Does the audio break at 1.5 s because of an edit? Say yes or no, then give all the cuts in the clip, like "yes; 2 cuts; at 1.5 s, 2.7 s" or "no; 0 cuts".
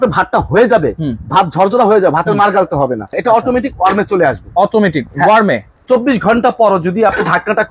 no; 2 cuts; at 3.2 s, 5.7 s